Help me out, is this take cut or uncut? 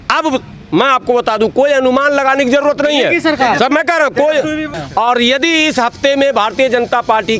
cut